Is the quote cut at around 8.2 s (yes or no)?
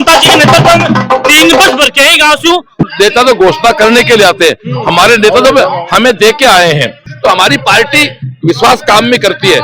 no